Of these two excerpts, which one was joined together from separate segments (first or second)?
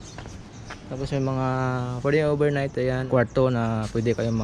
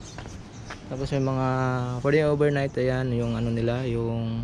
first